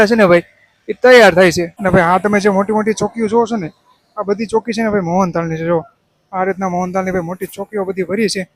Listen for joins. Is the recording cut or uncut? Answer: uncut